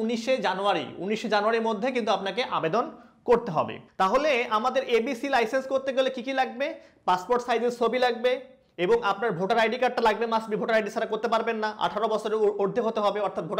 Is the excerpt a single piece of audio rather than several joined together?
no; 1 cut; at 3.8 s

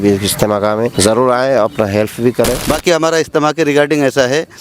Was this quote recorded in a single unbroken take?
no; 2 cuts; at 0.9 s, 2.7 s

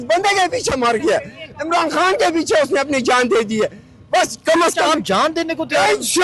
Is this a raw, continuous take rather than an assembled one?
yes; 0 cuts

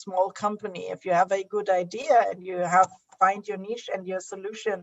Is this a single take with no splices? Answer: yes; 0 cuts

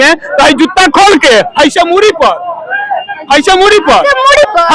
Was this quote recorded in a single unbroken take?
yes; 0 cuts

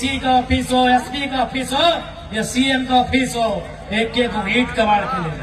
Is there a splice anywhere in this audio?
no; 0 cuts

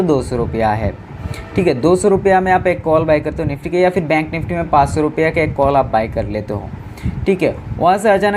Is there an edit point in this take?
no; 0 cuts

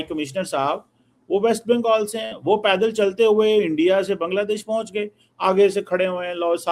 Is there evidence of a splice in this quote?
no; 0 cuts

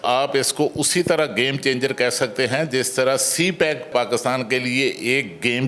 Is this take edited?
yes; 1 cut; at 3.9 s

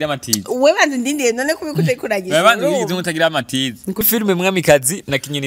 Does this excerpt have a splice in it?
yes; 1 cut; at 4.0 s

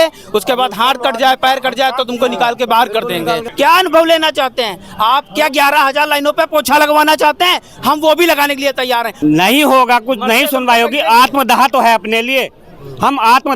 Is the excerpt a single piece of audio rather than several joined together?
no; 2 cuts; at 3.5 s, 9.1 s

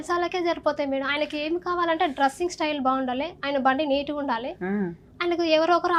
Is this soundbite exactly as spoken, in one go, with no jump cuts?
yes; 0 cuts

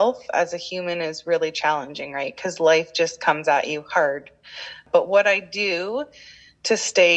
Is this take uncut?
no; 1 cut; at 4.8 s

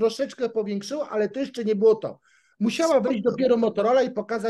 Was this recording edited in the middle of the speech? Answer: no; 0 cuts

